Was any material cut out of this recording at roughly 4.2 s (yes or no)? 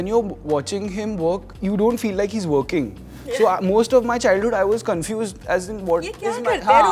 no